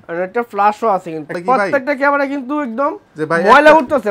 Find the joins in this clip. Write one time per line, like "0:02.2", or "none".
0:01.4